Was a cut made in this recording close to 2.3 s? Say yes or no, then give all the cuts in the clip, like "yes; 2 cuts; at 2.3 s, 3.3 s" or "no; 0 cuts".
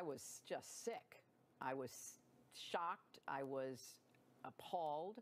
yes; 1 cut; at 2.3 s